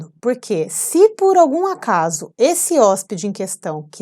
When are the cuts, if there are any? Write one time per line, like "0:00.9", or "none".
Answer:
none